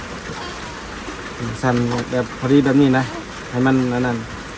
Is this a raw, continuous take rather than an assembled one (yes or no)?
yes